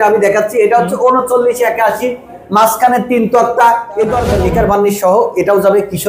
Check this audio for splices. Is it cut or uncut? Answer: cut